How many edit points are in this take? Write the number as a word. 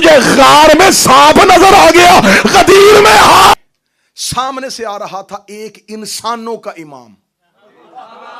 one